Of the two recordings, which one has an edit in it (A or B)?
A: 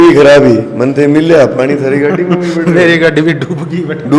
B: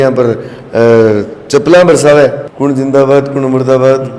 B